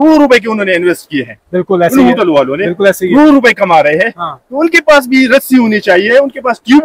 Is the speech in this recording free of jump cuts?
yes; 0 cuts

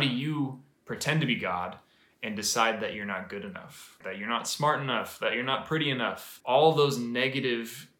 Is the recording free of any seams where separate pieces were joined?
no; 2 cuts; at 4.0 s, 6.3 s

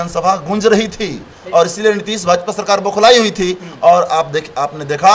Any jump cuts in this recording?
no; 0 cuts

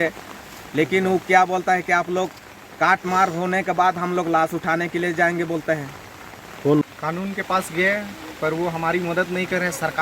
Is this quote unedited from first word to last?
no; 1 cut; at 6.8 s

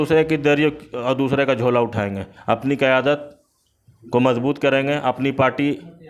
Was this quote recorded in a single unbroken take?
yes; 0 cuts

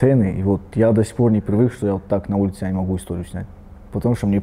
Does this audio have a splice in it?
no; 0 cuts

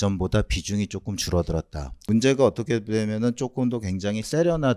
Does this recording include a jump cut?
yes; 1 cut; at 1.9 s

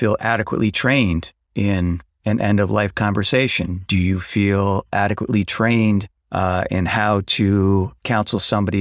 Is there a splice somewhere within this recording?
no; 0 cuts

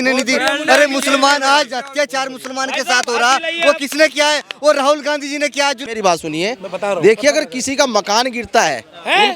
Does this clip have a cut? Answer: yes; 1 cut; at 5.8 s

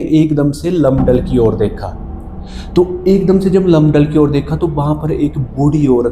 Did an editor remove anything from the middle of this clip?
no; 0 cuts

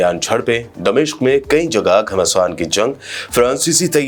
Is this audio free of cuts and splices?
yes; 0 cuts

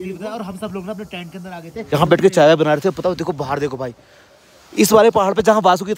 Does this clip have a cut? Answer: no; 0 cuts

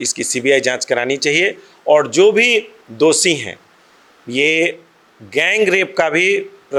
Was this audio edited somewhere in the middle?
no; 0 cuts

